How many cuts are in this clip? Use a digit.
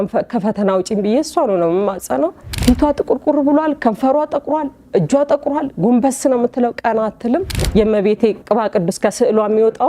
3